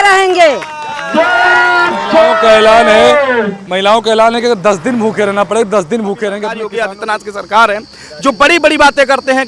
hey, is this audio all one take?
no; 1 cut; at 6.7 s

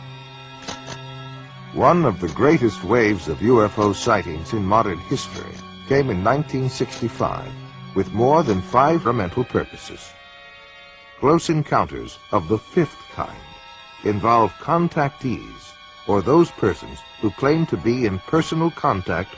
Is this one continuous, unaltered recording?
yes; 0 cuts

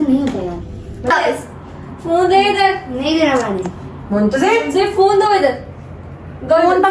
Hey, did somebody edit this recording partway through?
yes; 1 cut; at 1.1 s

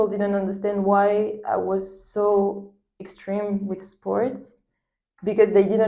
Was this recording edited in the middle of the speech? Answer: no; 0 cuts

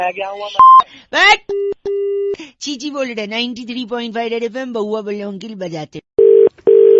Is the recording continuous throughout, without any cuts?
no; 1 cut; at 5.9 s

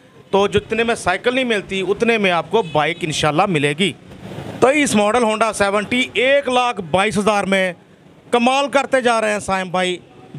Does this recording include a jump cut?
yes; 1 cut; at 4.1 s

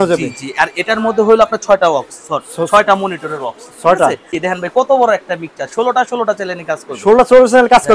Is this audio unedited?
no; 1 cut; at 4.4 s

